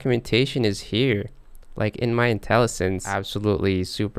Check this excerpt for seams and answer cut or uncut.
cut